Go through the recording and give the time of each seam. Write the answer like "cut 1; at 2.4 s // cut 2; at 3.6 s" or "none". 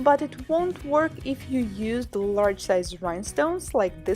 cut 1; at 2.3 s